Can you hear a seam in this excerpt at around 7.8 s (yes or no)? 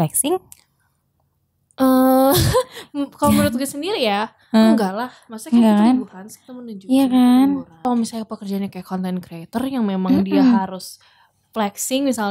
yes